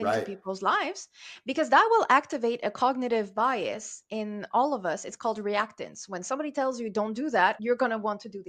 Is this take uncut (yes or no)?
no